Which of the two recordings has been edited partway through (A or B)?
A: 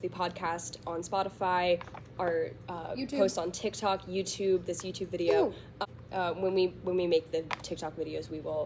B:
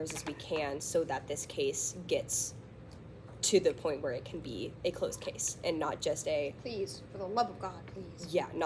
A